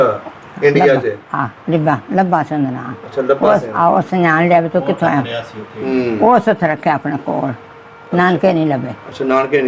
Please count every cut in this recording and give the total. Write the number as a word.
zero